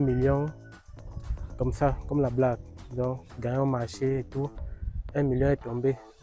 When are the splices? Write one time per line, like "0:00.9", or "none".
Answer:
none